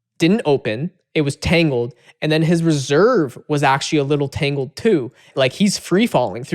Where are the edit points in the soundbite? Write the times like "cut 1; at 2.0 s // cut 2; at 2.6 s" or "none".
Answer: cut 1; at 5.3 s